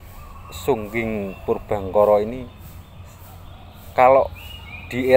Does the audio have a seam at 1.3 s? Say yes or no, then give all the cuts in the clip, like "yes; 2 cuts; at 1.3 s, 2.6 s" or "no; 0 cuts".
no; 0 cuts